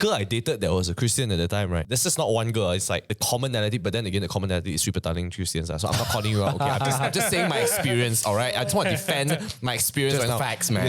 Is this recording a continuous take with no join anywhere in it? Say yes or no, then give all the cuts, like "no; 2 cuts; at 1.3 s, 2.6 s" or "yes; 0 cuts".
no; 2 cuts; at 1.9 s, 3.1 s